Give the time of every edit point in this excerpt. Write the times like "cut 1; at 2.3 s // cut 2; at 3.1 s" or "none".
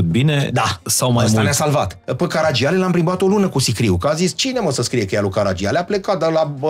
cut 1; at 2.0 s